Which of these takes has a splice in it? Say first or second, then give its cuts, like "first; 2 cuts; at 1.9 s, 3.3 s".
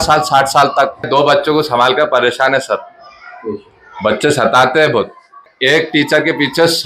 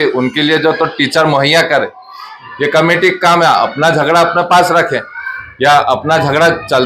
first; 2 cuts; at 1.1 s, 5.5 s